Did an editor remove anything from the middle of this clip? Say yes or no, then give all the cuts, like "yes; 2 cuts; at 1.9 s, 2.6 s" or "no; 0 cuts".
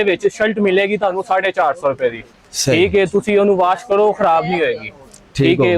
no; 0 cuts